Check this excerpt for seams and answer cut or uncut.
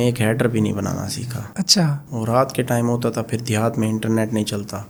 uncut